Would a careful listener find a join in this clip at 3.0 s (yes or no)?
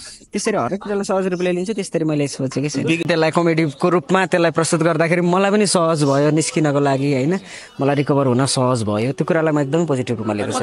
yes